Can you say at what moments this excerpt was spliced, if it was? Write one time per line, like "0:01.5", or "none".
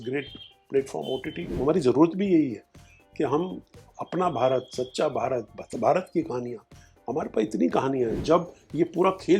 0:01.5
0:08.2